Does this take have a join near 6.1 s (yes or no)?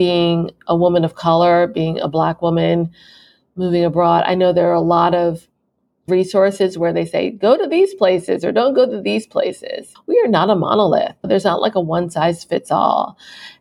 yes